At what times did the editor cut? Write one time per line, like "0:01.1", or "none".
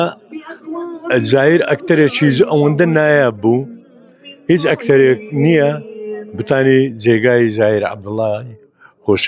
none

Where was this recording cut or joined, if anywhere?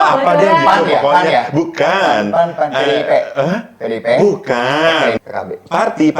0:05.2

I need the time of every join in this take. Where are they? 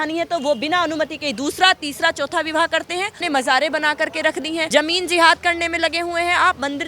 0:03.2
0:04.6

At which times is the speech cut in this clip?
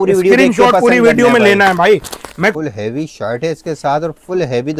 0:02.6

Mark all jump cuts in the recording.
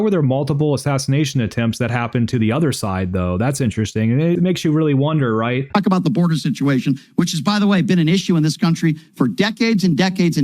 0:05.6

